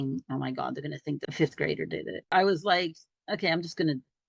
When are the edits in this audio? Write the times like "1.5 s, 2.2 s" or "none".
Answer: 1.3 s, 2.3 s